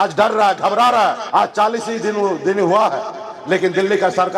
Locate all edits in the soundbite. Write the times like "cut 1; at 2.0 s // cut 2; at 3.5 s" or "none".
cut 1; at 1.2 s